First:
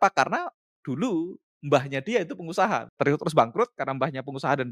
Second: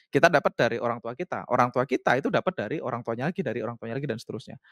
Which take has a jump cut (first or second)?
first